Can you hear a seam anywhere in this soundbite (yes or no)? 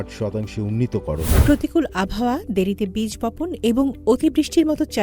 yes